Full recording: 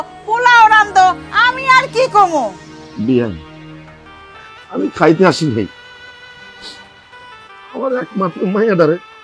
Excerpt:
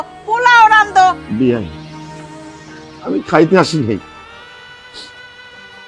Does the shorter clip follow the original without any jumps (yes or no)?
no